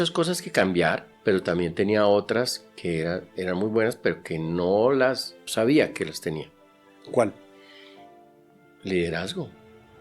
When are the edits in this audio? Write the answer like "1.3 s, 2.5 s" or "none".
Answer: 1.1 s, 5.4 s

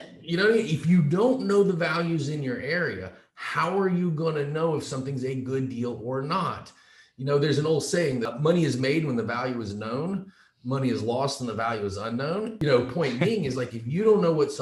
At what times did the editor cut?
8.3 s, 12.6 s

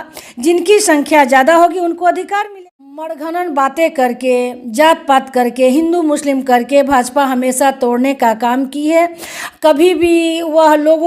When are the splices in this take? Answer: 2.5 s

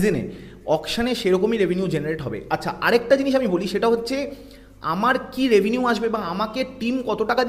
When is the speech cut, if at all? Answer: none

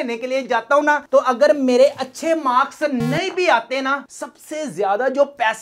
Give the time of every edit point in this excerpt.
4.0 s

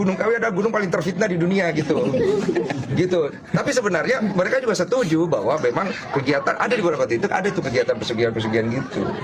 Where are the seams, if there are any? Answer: none

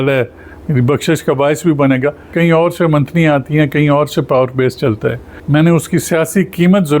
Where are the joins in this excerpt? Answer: 2.3 s, 5.3 s

